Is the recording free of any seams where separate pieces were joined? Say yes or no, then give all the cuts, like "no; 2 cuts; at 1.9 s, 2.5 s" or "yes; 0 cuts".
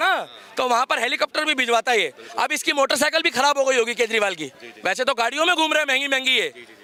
yes; 0 cuts